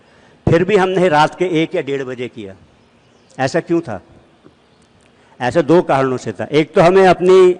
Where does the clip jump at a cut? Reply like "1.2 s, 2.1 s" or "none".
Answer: none